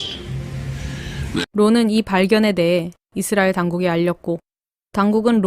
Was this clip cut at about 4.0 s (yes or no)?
no